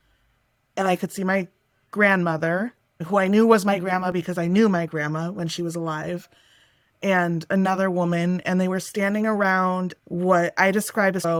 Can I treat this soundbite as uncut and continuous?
yes; 0 cuts

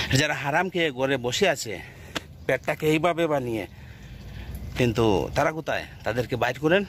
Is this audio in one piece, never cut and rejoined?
yes; 0 cuts

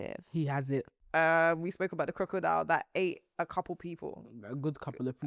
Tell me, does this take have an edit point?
yes; 1 cut; at 1.0 s

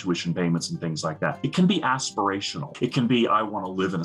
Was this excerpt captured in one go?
no; 2 cuts; at 1.4 s, 2.6 s

